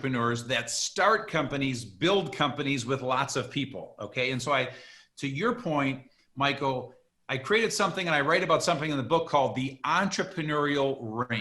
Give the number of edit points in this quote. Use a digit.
0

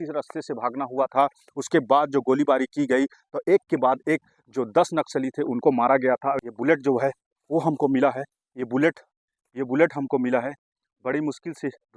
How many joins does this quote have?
1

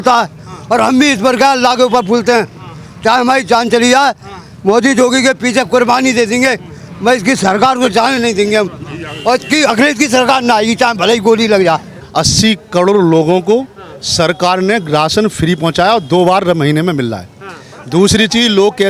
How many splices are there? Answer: 0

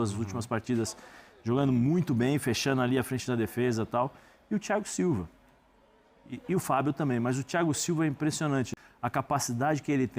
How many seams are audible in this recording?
1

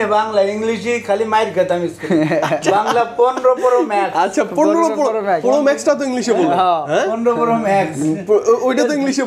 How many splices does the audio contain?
0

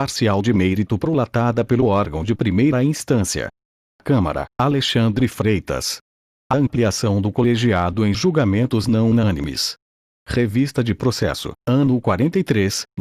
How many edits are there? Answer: 0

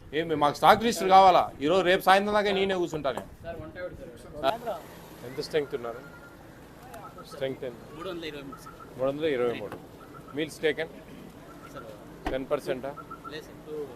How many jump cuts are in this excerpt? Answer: 1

